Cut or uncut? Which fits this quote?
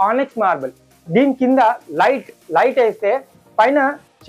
uncut